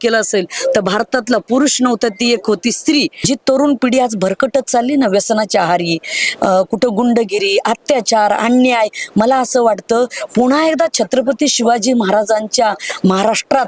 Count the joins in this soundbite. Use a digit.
1